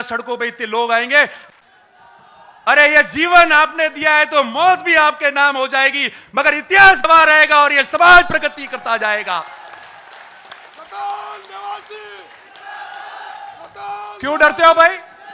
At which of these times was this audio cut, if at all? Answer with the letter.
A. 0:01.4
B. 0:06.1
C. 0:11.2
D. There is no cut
A